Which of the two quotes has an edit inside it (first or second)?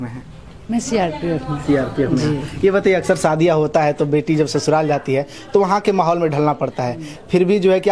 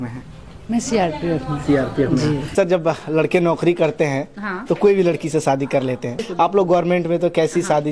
second